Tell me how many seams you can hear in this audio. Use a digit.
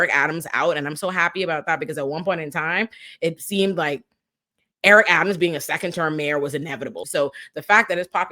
1